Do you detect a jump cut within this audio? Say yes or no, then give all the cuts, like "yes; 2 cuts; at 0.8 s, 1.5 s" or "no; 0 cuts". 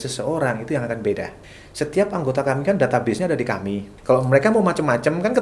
yes; 2 cuts; at 1.4 s, 3.9 s